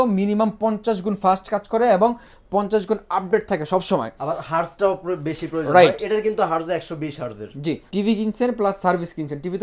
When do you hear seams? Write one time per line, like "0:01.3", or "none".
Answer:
0:07.8